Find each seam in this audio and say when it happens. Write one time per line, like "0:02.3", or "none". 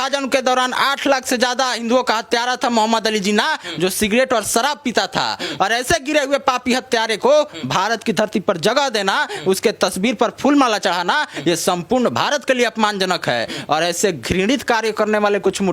none